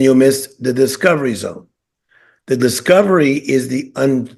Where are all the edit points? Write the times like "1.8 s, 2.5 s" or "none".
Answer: none